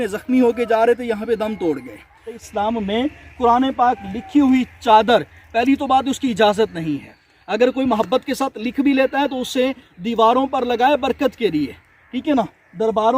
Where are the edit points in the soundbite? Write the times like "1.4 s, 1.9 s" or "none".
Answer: 2.4 s